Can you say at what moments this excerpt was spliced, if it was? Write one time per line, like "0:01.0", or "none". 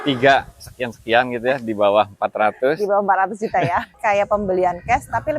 0:03.9

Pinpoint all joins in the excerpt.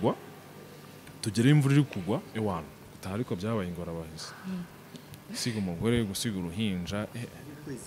0:02.3

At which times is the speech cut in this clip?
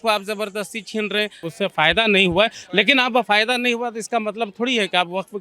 0:01.5

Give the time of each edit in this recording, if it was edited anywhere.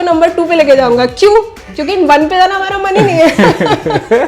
none

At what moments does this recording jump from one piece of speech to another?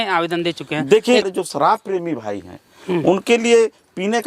0:01.3

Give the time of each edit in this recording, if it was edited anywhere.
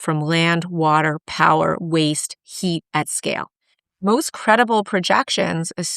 0:04.0

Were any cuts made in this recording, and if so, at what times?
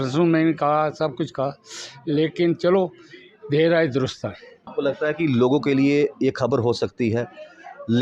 0:04.7

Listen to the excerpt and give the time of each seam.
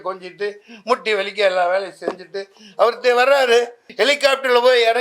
0:03.8

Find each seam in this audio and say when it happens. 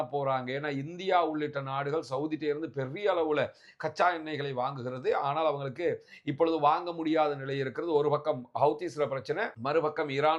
none

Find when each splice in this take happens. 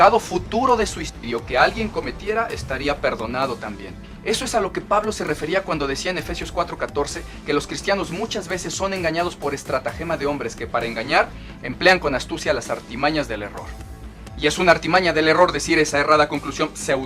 none

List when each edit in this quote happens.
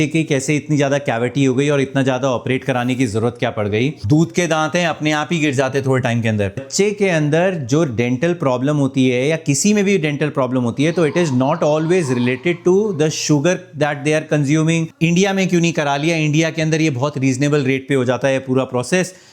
0:04.0
0:06.7
0:14.9

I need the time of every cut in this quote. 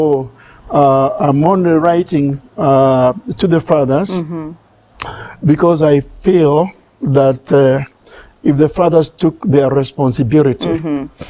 none

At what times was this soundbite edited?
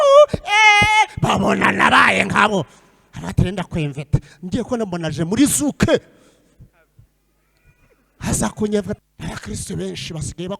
0:09.0

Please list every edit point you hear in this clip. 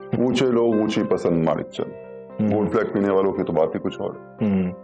none

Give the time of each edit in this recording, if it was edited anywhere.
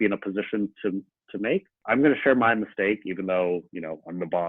0:01.8

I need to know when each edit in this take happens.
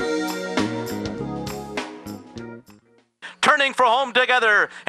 0:03.1

